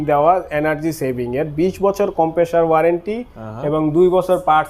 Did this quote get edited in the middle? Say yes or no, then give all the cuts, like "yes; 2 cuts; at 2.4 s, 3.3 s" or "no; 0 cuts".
no; 0 cuts